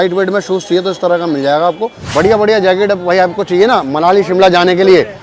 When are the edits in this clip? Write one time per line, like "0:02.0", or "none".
0:02.0